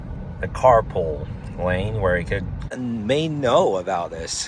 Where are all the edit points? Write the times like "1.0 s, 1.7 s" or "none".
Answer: 2.8 s